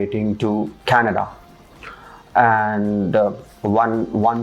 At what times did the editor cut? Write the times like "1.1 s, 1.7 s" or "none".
none